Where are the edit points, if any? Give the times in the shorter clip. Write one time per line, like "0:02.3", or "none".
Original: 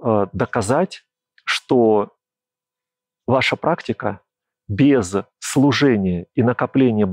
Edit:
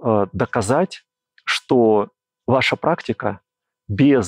0:02.2